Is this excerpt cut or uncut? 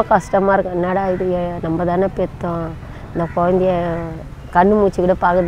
uncut